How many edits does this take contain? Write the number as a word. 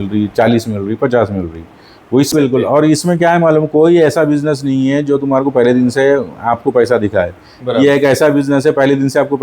one